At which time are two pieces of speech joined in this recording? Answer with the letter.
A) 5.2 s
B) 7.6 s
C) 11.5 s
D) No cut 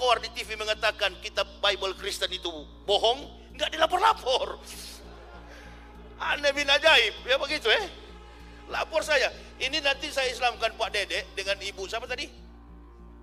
D